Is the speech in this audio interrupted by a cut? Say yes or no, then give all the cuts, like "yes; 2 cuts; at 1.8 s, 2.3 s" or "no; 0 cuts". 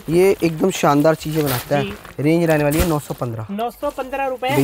no; 0 cuts